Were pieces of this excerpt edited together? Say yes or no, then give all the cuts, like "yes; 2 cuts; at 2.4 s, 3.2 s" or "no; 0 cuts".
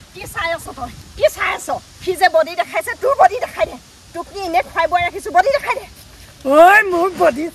no; 0 cuts